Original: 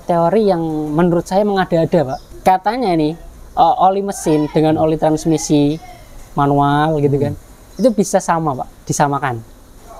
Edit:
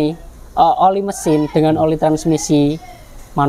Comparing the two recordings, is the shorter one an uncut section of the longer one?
yes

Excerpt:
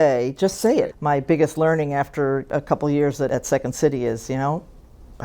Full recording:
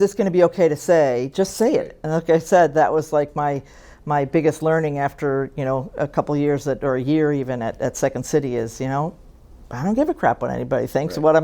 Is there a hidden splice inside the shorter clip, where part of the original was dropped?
yes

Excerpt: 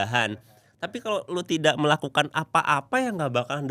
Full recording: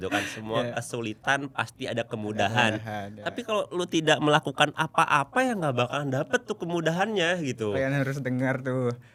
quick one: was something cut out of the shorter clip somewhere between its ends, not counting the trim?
no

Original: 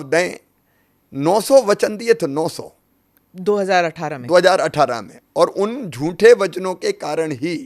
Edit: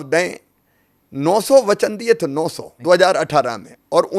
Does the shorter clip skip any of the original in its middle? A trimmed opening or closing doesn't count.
yes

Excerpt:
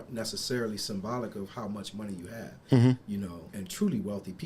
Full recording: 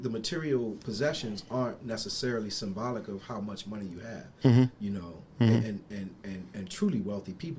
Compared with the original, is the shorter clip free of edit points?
no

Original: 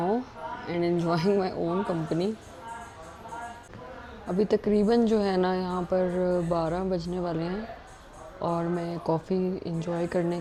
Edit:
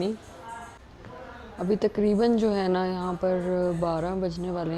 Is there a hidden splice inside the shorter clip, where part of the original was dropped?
yes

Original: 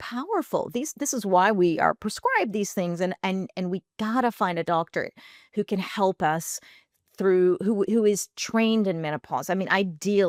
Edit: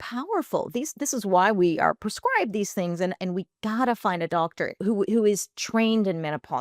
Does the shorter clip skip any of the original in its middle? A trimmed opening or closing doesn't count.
yes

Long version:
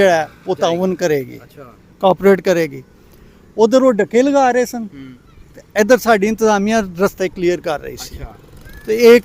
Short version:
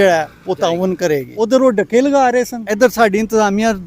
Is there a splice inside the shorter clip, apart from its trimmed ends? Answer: yes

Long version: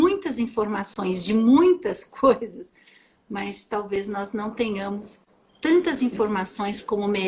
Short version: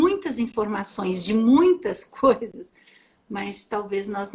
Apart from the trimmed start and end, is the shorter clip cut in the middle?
no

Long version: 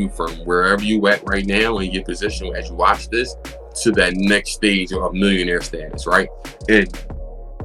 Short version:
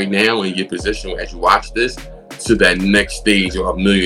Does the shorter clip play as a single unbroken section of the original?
yes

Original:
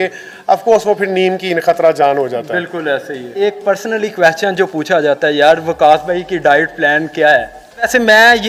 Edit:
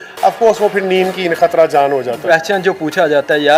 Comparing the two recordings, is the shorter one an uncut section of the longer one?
no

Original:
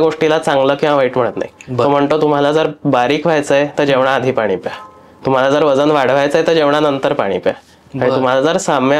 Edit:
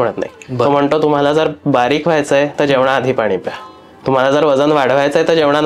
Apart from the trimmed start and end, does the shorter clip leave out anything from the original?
no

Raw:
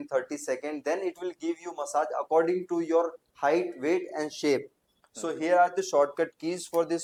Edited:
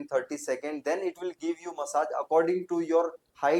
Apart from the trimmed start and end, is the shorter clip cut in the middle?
no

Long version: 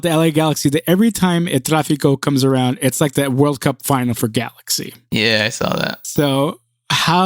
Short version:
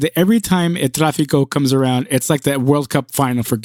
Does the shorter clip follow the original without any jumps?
yes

